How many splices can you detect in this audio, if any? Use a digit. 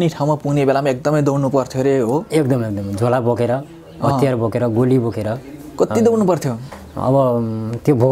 0